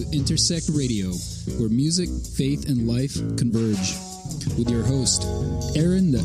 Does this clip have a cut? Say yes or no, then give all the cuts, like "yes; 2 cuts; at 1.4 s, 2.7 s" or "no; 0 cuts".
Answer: no; 0 cuts